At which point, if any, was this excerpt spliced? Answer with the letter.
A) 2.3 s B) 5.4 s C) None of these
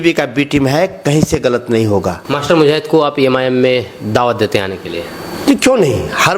A